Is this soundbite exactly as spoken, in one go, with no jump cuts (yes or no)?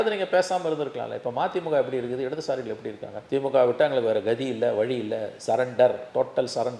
yes